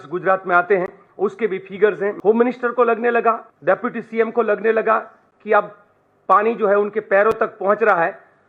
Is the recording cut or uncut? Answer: cut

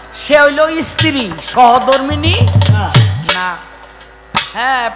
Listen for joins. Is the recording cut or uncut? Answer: uncut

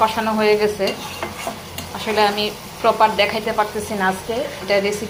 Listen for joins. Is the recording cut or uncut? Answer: uncut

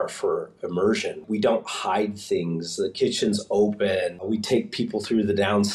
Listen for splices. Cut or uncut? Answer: cut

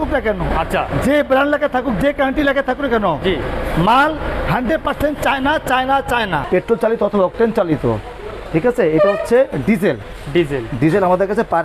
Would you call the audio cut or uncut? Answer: cut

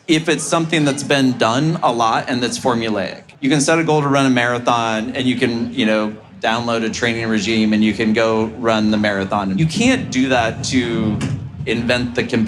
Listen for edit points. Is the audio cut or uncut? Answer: cut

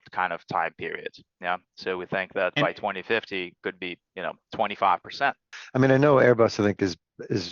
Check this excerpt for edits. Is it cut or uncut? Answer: cut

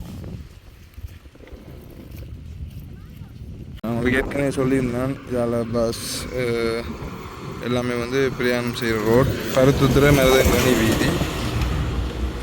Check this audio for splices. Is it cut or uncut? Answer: cut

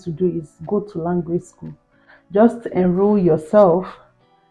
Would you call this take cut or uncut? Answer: uncut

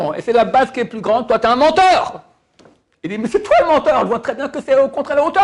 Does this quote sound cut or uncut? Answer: uncut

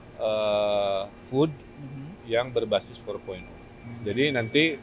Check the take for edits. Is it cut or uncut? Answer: cut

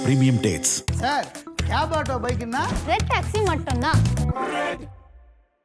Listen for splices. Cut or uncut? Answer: uncut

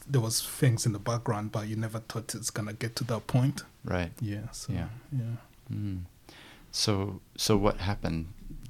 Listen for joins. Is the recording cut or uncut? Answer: uncut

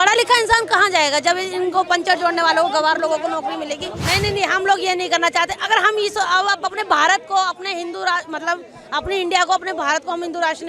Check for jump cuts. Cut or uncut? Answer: cut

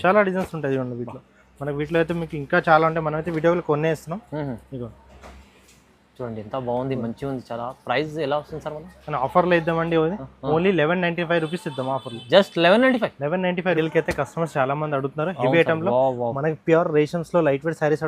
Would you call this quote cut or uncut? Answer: cut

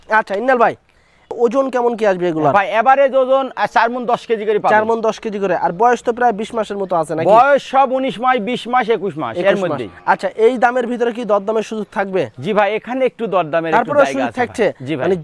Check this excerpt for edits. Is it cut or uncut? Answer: cut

